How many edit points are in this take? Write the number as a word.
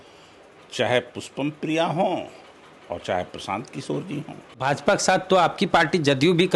one